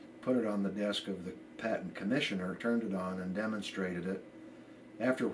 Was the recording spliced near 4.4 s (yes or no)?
no